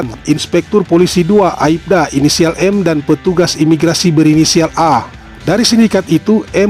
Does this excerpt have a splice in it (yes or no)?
no